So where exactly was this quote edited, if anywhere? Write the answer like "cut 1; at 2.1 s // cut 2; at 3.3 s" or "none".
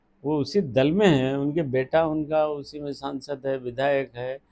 none